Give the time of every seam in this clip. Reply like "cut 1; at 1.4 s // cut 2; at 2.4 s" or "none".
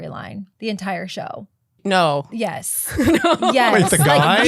cut 1; at 1.7 s